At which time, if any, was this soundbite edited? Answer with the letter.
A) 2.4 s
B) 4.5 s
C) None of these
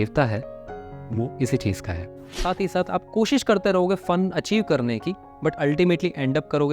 A